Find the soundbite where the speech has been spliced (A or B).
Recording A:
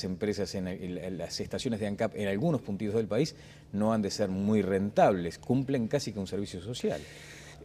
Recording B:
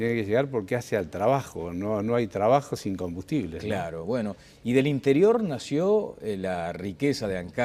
A